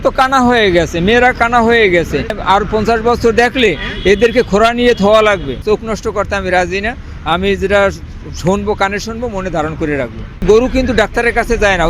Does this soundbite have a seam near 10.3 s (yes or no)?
yes